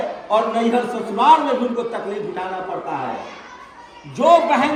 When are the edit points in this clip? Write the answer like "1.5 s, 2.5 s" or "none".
none